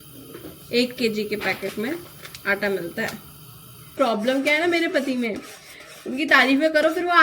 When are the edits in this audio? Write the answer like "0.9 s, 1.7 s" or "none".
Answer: 3.9 s